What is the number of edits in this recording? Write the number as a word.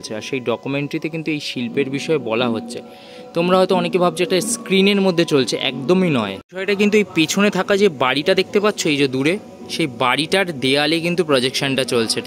zero